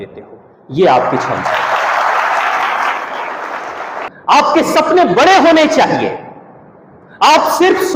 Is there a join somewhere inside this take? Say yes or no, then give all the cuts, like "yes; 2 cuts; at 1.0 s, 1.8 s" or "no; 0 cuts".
yes; 1 cut; at 4.1 s